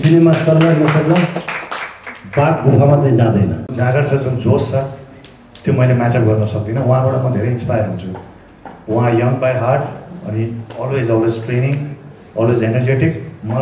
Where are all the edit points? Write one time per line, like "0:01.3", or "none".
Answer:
0:03.7